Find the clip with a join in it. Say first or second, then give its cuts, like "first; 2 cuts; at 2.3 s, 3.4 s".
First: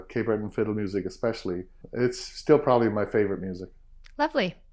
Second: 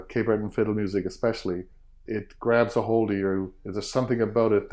second; 1 cut; at 1.9 s